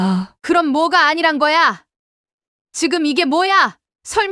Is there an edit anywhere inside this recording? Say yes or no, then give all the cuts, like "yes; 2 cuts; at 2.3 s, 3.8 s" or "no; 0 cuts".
no; 0 cuts